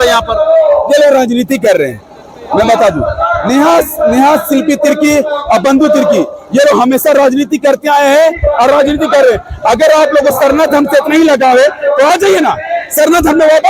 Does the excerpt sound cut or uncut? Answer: uncut